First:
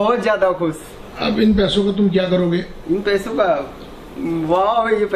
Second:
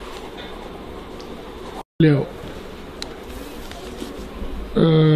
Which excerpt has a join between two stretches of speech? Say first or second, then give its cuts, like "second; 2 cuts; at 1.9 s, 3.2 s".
second; 1 cut; at 2.0 s